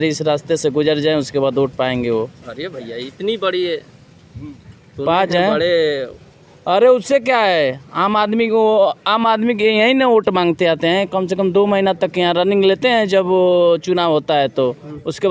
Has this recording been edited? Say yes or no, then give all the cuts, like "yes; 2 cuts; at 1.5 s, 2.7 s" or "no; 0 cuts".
no; 0 cuts